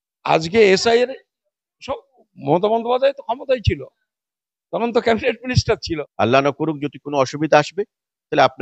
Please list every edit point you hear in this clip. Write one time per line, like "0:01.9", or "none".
0:05.8